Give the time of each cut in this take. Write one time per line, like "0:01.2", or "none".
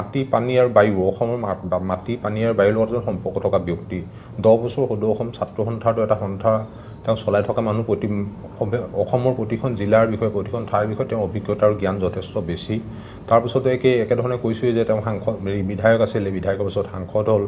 none